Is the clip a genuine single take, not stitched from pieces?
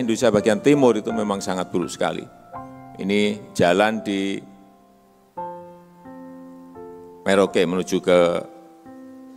no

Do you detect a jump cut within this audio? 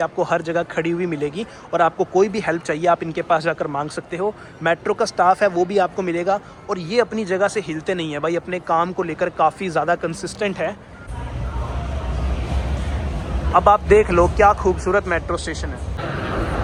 no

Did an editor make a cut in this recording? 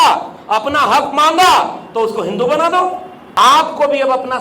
yes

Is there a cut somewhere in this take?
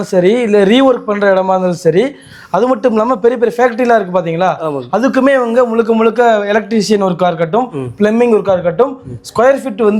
no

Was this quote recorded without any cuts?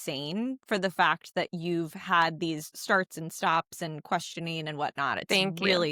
yes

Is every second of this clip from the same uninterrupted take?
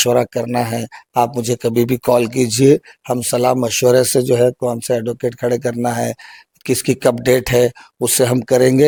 yes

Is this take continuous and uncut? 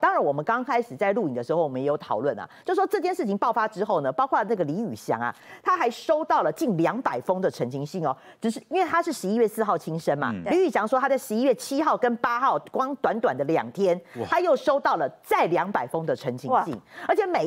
yes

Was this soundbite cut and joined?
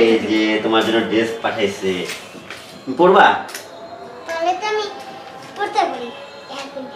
no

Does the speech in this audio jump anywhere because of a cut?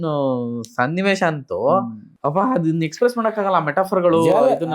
yes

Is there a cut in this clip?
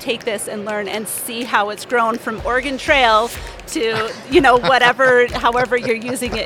no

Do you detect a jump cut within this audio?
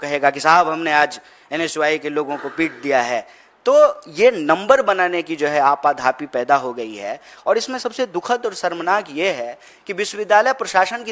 no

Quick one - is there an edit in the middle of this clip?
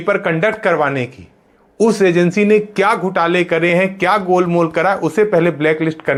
no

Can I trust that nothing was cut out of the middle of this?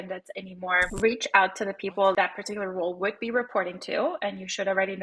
no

